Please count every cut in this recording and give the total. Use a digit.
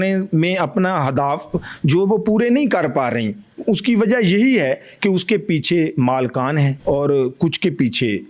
1